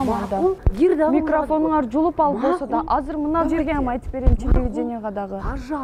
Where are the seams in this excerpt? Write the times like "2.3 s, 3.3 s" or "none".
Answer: none